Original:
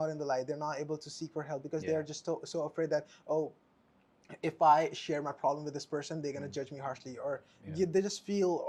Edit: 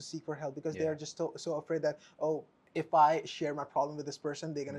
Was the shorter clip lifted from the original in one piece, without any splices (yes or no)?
no